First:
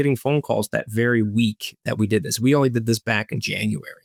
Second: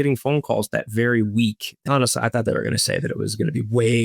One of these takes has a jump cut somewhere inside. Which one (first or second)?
second